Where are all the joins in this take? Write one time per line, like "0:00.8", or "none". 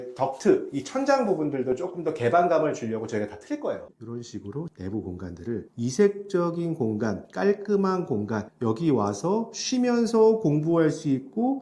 0:03.9